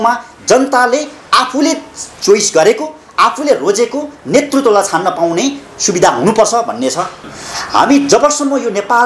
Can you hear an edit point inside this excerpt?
yes; 1 cut; at 7.2 s

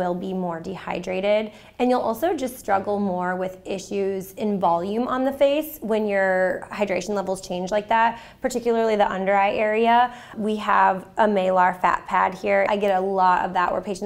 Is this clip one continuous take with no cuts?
no; 2 cuts; at 10.3 s, 12.7 s

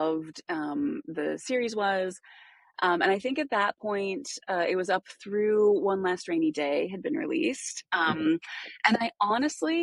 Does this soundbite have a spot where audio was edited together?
no; 0 cuts

